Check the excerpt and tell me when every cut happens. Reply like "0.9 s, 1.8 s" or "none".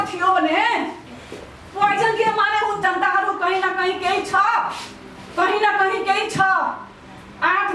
2.8 s